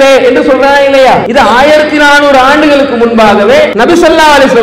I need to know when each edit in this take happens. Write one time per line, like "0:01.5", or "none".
0:01.3
0:03.7